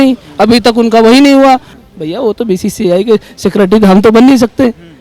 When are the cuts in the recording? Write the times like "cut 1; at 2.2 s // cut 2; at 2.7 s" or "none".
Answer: cut 1; at 1.8 s